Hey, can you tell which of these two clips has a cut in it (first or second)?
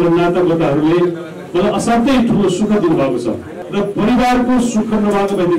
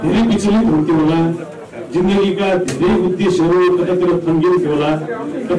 first